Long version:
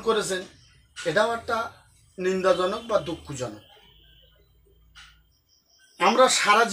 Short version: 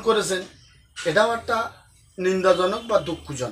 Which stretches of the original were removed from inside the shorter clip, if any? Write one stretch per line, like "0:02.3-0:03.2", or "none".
none

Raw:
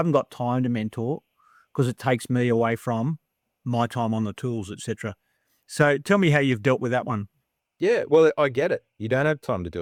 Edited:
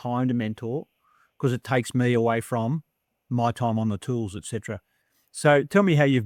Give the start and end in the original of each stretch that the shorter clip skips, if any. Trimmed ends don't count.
none

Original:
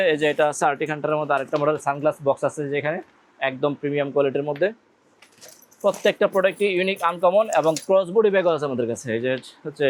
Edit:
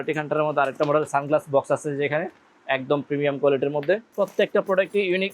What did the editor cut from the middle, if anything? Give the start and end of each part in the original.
0:04.8-0:05.7

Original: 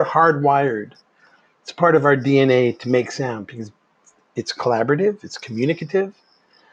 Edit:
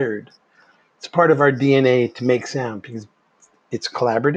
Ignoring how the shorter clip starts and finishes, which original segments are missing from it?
none

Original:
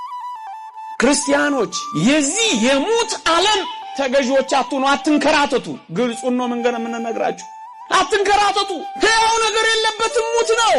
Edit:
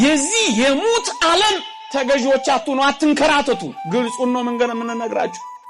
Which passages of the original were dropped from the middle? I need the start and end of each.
none

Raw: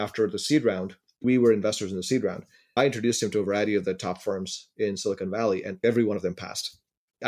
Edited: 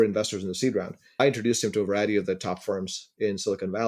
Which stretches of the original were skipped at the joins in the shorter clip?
0:02.5-0:02.6

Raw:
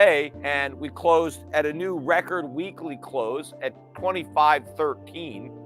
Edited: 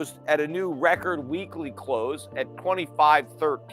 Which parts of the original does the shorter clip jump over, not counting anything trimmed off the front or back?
0:03.8-0:03.9

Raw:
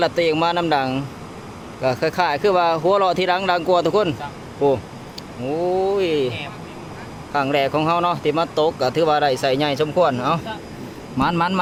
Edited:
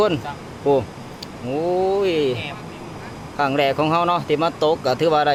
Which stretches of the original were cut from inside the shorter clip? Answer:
none

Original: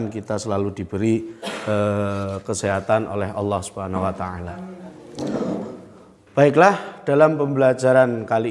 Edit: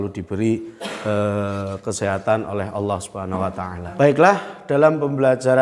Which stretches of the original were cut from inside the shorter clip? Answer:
0:04.4-0:06.2

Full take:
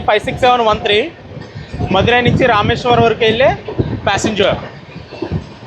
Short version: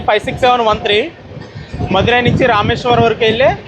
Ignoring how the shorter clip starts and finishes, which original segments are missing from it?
none

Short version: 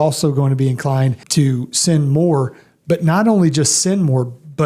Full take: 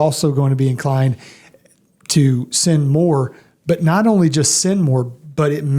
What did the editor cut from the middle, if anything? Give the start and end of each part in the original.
0:01.2-0:02.0

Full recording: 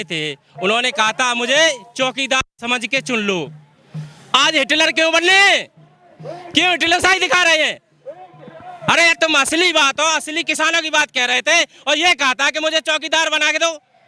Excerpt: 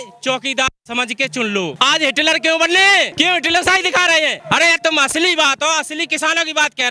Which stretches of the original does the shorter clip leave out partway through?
0:03.5-0:04.3
0:05.6-0:06.5
0:07.8-0:08.8

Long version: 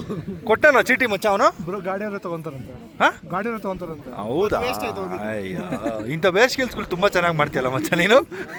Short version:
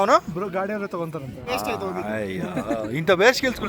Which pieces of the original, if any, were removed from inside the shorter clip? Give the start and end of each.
0:02.8-0:04.6

